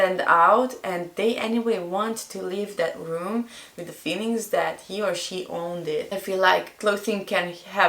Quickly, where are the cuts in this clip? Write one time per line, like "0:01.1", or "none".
0:06.2